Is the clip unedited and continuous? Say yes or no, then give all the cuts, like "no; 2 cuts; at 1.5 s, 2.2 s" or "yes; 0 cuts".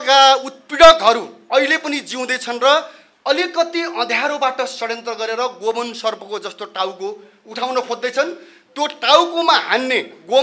yes; 0 cuts